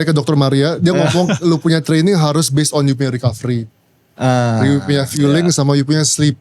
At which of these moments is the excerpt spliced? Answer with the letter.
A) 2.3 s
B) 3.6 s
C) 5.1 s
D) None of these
D